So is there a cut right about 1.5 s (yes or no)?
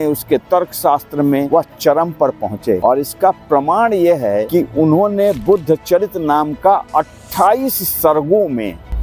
yes